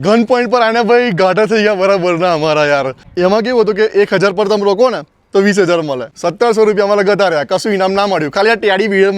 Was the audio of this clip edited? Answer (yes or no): yes